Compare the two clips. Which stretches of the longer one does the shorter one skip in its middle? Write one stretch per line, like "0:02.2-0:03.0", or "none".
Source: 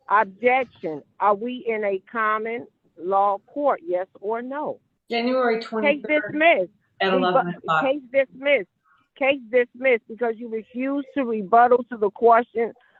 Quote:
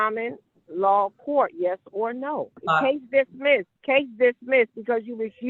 0:04.9-0:07.6
0:08.7-0:09.1